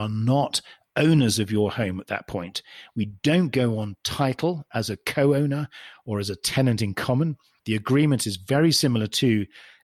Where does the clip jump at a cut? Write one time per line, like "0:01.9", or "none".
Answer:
0:07.5